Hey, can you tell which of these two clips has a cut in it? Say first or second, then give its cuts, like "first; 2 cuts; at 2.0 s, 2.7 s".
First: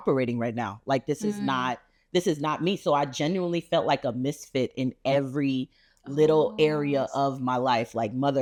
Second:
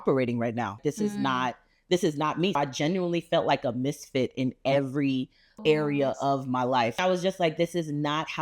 second; 4 cuts; at 0.8 s, 2.6 s, 5.6 s, 6.9 s